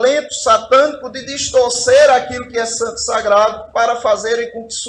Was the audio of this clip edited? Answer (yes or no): no